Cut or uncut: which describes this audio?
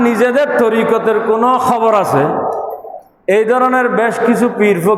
uncut